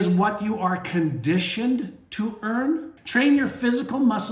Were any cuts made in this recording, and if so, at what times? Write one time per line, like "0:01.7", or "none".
0:03.0